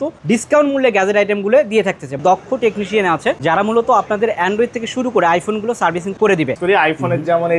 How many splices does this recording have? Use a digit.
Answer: 2